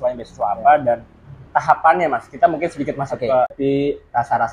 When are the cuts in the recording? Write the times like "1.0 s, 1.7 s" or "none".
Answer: 3.5 s

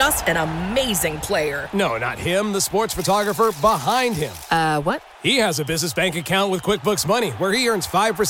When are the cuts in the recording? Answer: none

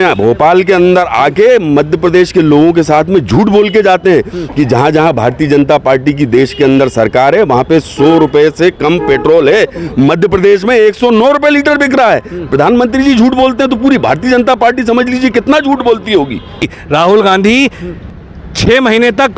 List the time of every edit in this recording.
16.7 s

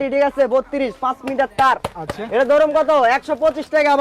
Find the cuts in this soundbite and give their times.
none

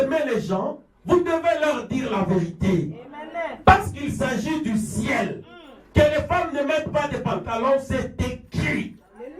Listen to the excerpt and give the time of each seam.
none

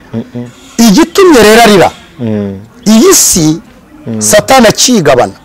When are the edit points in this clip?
2.1 s

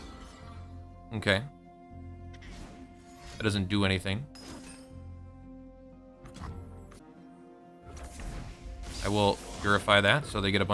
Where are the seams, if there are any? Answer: 7.0 s

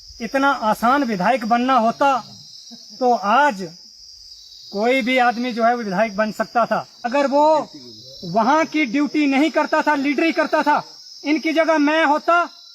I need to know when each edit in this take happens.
7.1 s

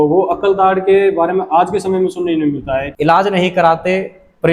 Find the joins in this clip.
2.9 s

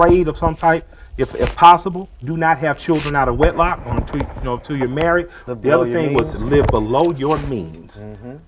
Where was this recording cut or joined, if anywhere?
none

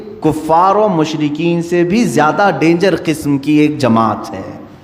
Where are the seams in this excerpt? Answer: none

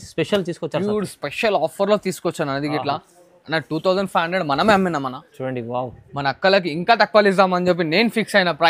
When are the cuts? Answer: none

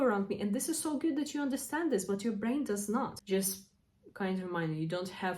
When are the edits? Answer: 3.2 s

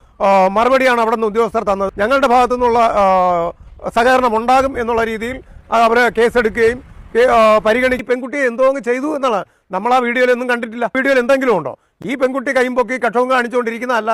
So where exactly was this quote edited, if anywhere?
1.9 s, 8.0 s, 11.0 s

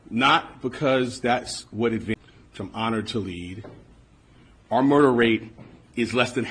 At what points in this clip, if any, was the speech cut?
none

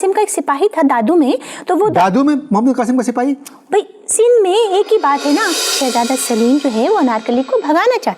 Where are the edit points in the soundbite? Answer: 5.7 s

